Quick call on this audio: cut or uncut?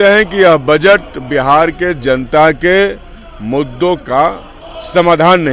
uncut